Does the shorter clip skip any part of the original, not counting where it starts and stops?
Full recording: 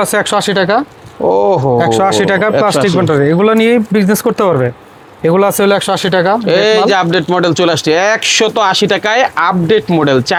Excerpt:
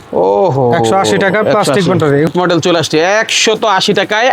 yes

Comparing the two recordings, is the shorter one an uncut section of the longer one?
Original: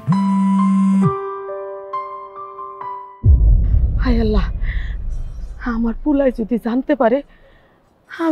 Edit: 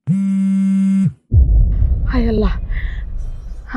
no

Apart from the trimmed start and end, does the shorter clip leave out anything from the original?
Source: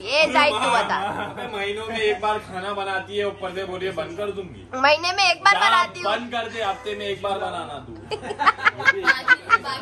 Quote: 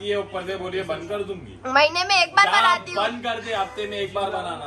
no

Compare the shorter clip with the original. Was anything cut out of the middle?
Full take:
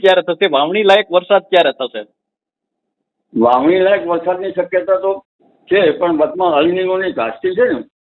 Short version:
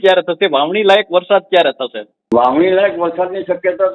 yes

